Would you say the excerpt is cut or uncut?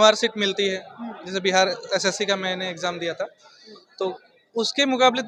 uncut